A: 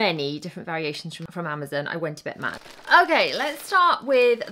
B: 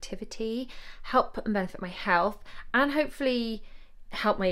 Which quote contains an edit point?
A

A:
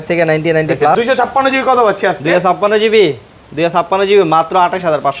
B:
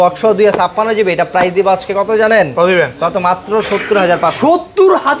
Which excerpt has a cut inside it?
A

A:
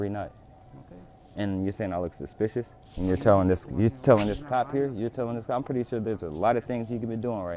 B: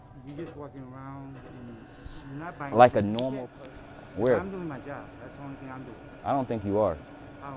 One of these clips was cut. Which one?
B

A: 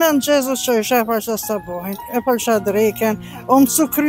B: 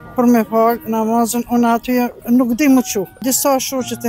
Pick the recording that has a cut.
B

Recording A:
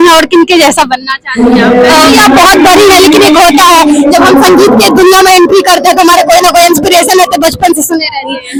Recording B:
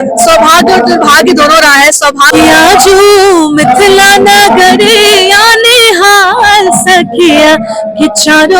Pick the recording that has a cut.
B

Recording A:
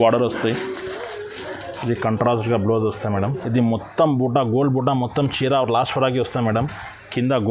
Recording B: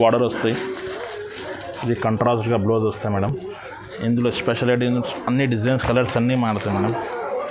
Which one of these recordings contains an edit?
A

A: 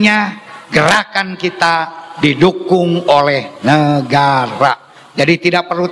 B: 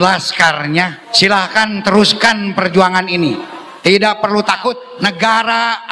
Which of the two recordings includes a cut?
B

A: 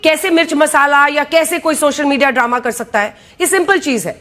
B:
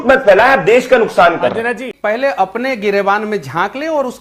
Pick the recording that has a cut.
B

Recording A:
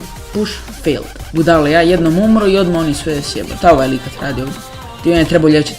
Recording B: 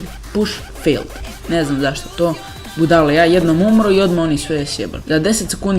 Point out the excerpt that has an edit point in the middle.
A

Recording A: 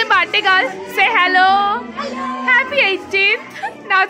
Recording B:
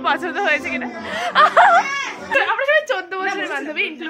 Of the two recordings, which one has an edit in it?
B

